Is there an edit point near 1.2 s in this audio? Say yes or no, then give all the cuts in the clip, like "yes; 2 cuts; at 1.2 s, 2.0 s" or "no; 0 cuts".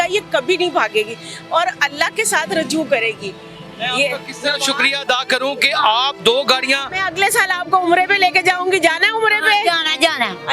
no; 0 cuts